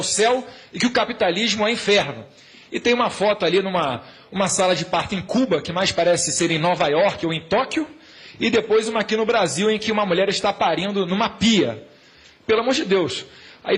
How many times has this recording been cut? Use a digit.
1